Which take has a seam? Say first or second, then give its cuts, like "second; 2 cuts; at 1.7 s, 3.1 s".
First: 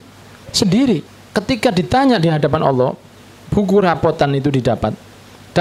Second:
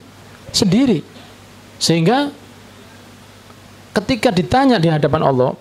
first; 1 cut; at 1.2 s